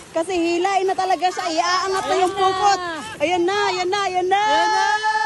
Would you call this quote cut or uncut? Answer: uncut